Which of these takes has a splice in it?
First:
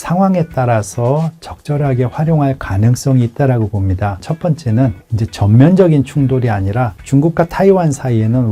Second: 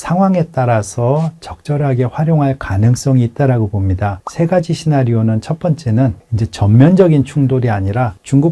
first; 1 cut; at 4.3 s

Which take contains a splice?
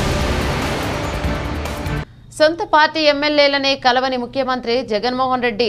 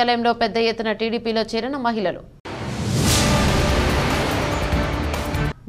first; 1 cut; at 1.7 s

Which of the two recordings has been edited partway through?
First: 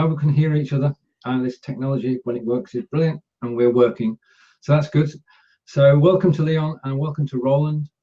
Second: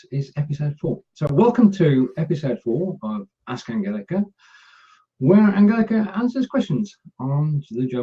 second; 1 cut; at 2.0 s

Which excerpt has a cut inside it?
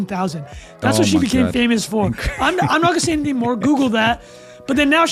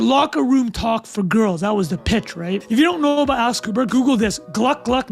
second; 1 cut; at 2.6 s

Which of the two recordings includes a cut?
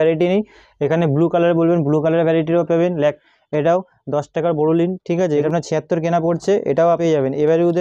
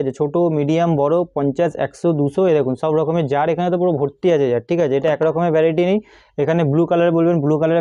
first; 3 cuts; at 3.2 s, 5.4 s, 7.0 s

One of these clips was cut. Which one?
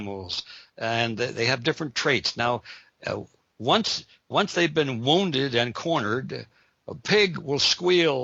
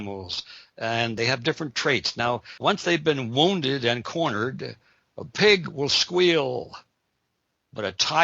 second; 2 cuts; at 1.2 s, 2.5 s

